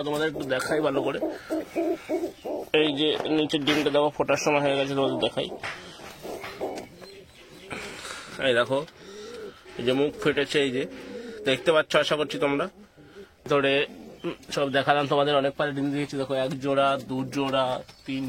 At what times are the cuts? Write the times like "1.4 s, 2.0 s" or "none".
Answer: 13.5 s